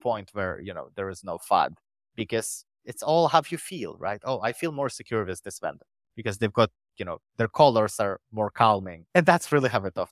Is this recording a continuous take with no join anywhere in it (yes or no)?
no